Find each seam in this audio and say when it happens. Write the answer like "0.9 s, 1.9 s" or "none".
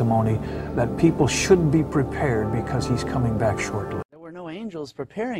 4.1 s